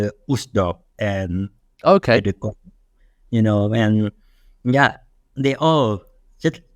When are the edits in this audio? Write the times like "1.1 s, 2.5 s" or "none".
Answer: none